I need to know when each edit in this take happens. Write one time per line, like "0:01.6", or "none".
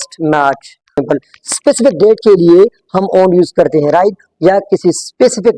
0:01.0